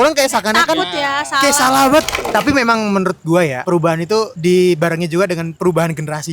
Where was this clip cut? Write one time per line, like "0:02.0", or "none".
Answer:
0:02.2
0:03.9
0:05.5